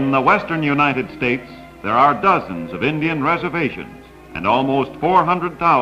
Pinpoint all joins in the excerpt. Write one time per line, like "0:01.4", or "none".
none